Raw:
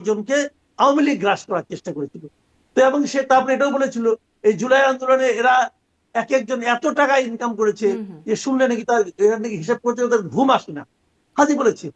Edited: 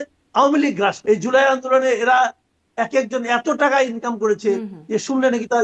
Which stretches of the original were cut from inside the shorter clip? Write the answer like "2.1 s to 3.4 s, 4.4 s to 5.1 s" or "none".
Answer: 1.4 s to 4.4 s